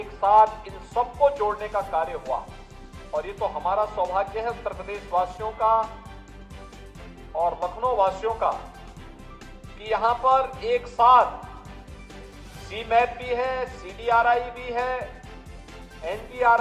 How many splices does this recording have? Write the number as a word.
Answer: zero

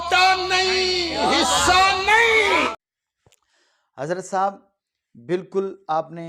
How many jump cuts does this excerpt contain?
zero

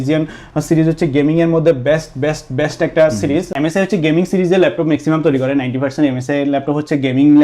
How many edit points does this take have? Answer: one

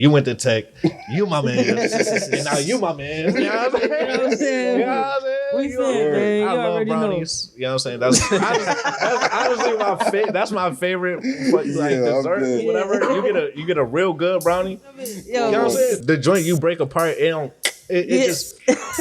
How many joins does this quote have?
two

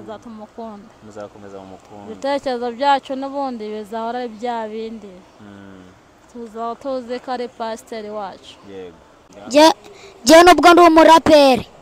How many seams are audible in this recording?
one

